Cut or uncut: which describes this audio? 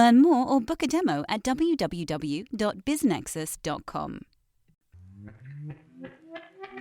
cut